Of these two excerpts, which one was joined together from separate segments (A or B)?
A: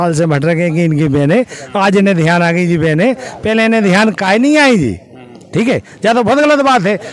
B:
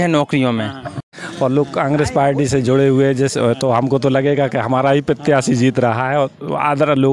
B